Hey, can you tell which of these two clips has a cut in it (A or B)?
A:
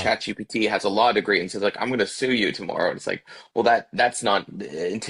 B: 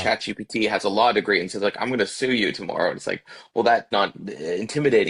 B